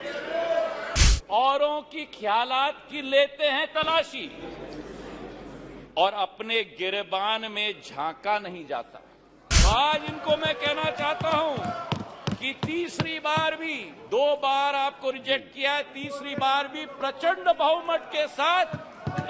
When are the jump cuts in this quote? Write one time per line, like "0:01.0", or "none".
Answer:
0:01.0
0:09.5